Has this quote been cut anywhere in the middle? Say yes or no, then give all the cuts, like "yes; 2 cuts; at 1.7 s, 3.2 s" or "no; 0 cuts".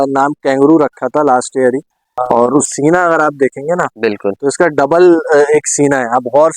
yes; 1 cut; at 2.7 s